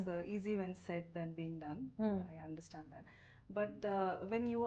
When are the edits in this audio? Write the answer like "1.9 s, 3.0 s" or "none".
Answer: none